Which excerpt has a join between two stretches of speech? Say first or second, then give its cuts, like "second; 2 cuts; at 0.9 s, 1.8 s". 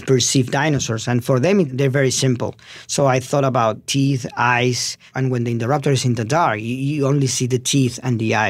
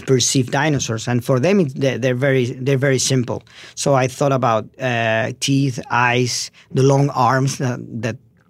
first; 3 cuts; at 1.7 s, 3.8 s, 5.1 s